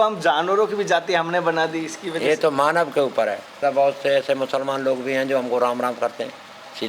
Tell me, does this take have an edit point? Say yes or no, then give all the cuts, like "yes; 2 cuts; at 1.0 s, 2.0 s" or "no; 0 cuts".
yes; 1 cut; at 3.6 s